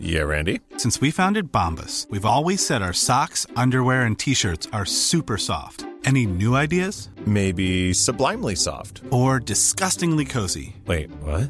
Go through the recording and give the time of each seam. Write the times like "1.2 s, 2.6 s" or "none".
none